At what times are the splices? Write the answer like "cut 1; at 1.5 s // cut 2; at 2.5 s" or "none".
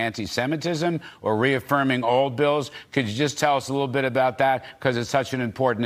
none